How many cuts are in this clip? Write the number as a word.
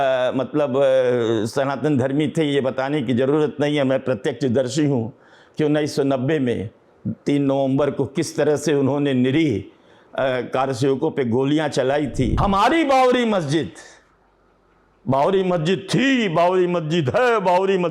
one